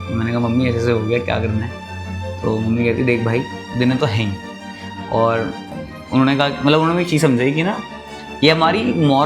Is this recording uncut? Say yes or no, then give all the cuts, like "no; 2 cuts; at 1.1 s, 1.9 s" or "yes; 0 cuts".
yes; 0 cuts